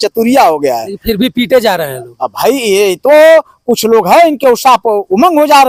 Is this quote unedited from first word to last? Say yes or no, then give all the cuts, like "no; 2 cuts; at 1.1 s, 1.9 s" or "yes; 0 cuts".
yes; 0 cuts